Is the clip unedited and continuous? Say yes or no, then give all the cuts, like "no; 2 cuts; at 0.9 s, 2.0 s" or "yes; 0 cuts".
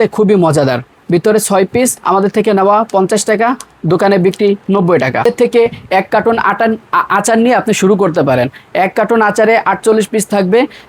no; 2 cuts; at 0.9 s, 5.2 s